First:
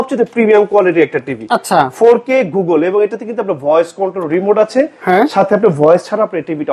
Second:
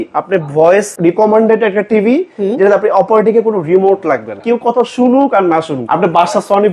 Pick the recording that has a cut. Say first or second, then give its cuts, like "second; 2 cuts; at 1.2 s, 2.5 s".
second; 3 cuts; at 0.9 s, 4.3 s, 5.8 s